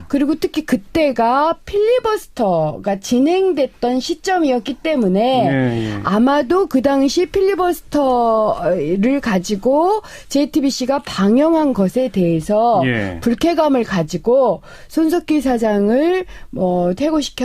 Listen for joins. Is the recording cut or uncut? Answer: cut